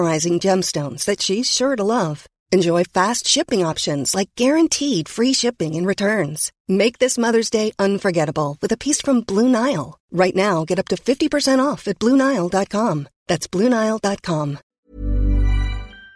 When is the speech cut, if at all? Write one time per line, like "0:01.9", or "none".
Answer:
0:14.7